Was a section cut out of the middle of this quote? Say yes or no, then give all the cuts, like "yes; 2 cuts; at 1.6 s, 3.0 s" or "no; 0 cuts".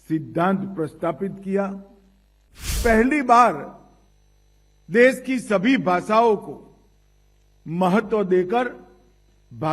yes; 1 cut; at 2.8 s